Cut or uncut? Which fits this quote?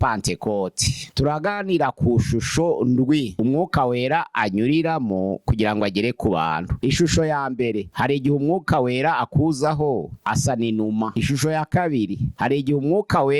cut